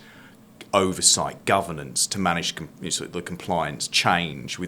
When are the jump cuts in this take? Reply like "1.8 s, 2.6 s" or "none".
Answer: none